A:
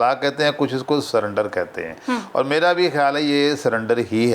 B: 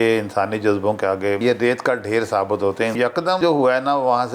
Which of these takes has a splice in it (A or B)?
B